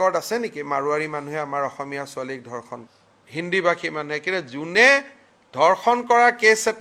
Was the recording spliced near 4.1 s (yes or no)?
no